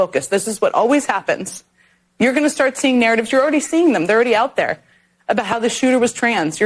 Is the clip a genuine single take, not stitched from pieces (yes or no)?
yes